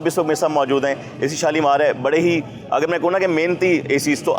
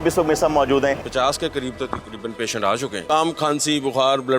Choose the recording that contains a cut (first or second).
second